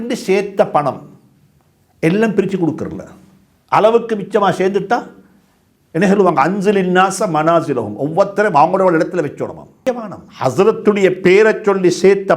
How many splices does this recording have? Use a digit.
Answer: 1